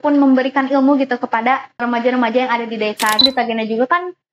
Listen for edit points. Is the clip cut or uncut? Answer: cut